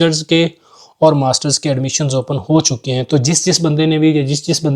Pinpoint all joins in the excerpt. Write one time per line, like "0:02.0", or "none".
none